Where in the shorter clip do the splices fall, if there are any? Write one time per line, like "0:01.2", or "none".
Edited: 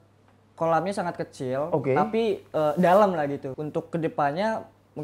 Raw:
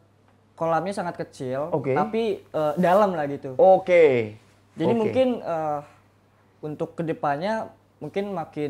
0:03.4